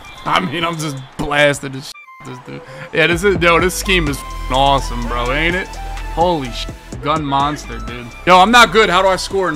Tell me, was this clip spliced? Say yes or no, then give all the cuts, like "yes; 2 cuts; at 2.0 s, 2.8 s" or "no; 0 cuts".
yes; 1 cut; at 8.1 s